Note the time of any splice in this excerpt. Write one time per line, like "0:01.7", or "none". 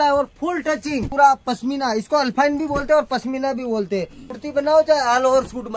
0:01.1
0:04.4